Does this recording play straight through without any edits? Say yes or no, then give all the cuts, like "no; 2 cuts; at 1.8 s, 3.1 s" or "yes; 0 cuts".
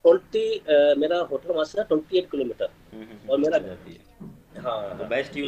no; 1 cut; at 3.7 s